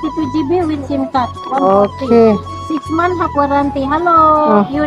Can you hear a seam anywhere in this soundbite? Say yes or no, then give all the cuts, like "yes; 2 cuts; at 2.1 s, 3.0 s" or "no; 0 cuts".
no; 0 cuts